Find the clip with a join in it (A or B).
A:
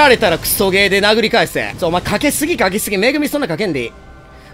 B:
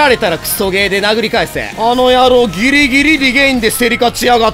B